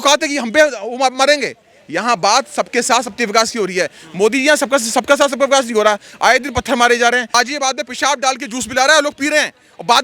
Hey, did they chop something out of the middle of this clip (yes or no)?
yes